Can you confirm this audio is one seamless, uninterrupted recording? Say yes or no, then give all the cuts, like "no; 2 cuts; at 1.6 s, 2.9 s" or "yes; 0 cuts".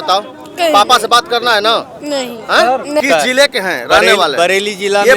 no; 1 cut; at 3.0 s